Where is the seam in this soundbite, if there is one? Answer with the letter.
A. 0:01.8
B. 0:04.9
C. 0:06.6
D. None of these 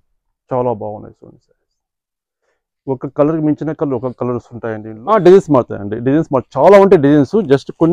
B